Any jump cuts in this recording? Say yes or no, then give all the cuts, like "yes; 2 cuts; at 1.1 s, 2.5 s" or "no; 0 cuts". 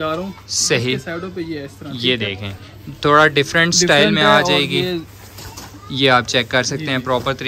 no; 0 cuts